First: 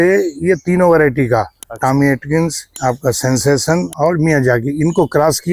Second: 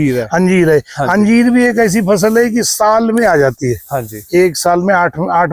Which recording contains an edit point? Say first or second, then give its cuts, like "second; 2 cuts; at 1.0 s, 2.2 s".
first; 2 cuts; at 2.7 s, 3.9 s